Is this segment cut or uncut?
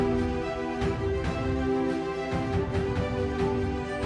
uncut